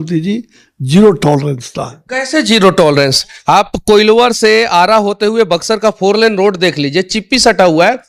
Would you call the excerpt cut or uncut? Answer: uncut